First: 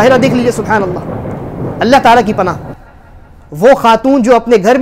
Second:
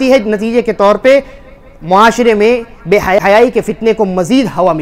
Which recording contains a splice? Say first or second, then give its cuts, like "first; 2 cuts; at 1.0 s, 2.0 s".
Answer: second; 1 cut; at 3.2 s